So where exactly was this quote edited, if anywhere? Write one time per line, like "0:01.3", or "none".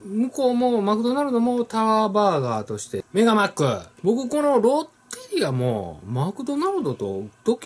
0:03.0
0:03.9